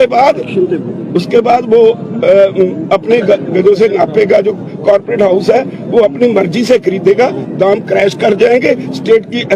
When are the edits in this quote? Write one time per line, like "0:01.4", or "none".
none